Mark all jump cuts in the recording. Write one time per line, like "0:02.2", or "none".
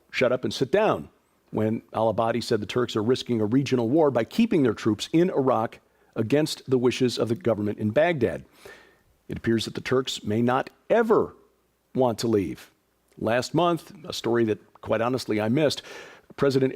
0:13.3